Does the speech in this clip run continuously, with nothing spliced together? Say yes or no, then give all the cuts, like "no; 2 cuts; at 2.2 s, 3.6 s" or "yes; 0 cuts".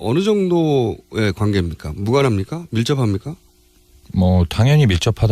yes; 0 cuts